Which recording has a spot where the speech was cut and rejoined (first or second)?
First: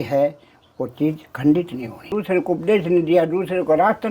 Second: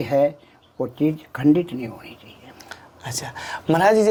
first